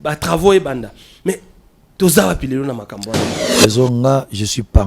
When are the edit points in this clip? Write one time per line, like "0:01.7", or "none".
0:03.4